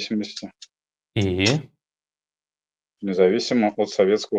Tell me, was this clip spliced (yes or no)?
no